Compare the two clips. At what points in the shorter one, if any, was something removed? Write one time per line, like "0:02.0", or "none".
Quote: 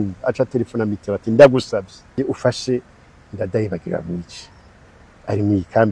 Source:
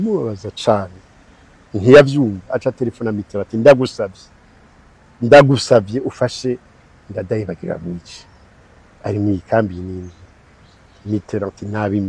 0:02.2